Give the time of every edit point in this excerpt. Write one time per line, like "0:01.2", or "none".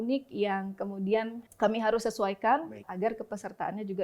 0:01.4
0:02.9